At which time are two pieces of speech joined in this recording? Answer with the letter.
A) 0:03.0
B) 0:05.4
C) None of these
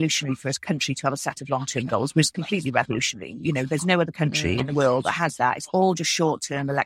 C